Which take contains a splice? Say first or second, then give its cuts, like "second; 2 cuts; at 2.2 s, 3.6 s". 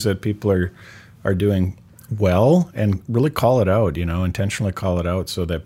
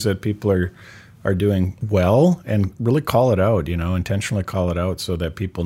second; 1 cut; at 1.8 s